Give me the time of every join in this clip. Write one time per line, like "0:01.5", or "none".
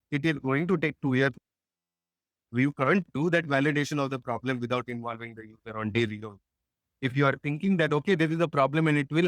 0:01.9